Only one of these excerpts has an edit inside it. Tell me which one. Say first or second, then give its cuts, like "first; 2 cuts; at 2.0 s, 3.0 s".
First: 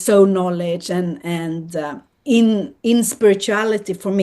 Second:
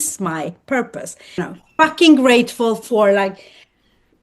second; 1 cut; at 1.4 s